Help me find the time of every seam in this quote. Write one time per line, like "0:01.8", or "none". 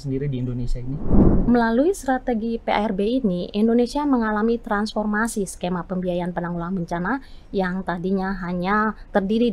0:01.2